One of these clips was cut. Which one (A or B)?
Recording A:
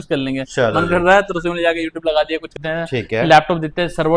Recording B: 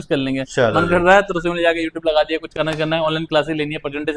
A